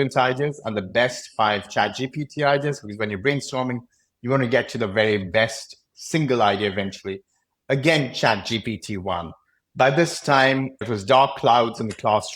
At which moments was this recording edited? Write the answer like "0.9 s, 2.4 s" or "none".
10.8 s